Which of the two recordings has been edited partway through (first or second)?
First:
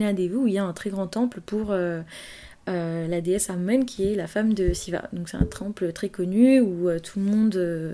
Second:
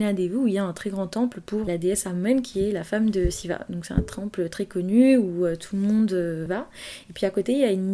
second